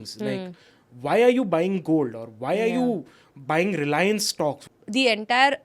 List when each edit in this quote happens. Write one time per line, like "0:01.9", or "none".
0:04.7